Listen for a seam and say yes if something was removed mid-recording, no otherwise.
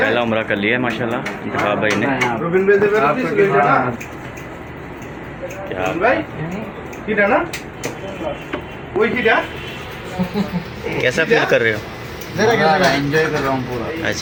no